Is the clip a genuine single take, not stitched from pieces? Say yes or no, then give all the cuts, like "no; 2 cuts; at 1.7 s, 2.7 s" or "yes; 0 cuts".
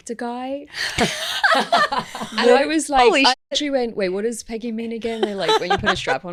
yes; 0 cuts